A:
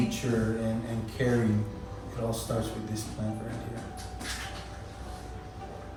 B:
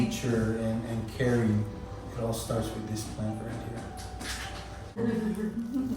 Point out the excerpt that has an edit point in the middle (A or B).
B